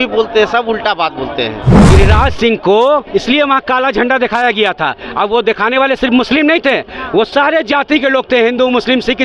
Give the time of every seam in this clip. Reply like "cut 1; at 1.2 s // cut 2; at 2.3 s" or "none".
cut 1; at 1.7 s